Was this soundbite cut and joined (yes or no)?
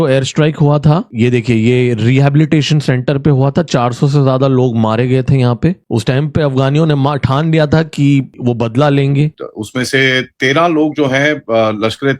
yes